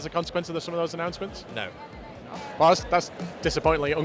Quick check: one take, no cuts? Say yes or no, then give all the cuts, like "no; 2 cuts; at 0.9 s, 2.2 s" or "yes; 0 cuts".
no; 1 cut; at 2.4 s